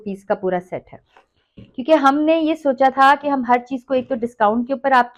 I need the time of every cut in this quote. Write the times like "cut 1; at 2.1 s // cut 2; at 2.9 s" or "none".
none